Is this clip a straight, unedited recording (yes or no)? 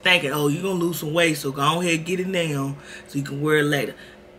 yes